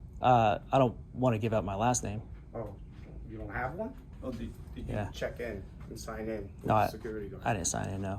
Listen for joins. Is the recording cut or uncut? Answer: cut